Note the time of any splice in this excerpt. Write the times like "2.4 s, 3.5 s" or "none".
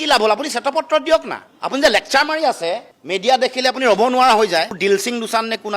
4.7 s

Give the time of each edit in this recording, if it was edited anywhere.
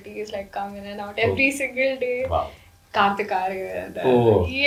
none

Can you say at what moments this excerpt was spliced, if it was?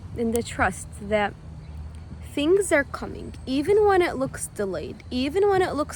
none

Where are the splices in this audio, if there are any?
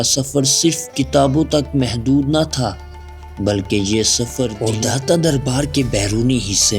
4.5 s

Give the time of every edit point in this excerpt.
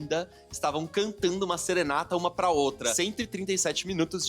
2.9 s

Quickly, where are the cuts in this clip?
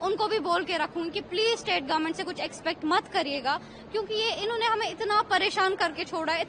none

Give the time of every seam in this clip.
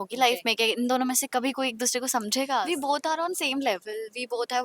2.6 s

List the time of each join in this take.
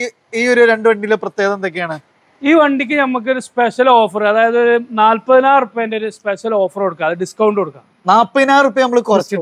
none

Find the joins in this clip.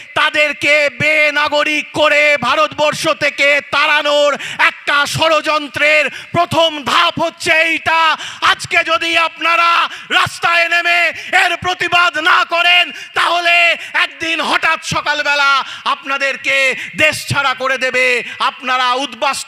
none

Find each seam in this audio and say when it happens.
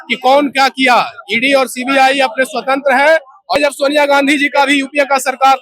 3.6 s

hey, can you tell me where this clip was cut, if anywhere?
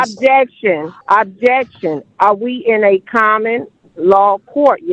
0.9 s

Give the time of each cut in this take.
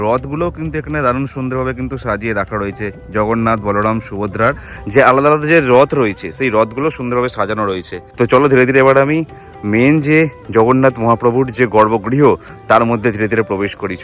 none

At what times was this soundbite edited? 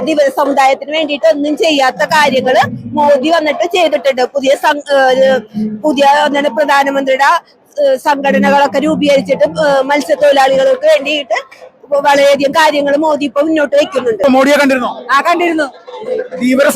14.2 s

